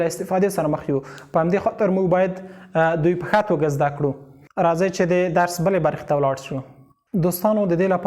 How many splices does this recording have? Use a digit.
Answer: 0